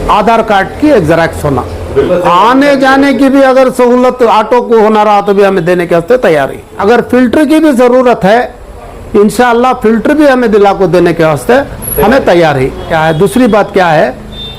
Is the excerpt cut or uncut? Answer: cut